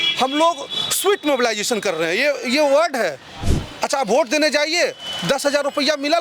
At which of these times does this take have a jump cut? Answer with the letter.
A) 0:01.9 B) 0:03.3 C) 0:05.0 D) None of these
B